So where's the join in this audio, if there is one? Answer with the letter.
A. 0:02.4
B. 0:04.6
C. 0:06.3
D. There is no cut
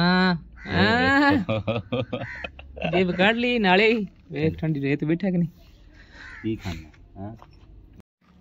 D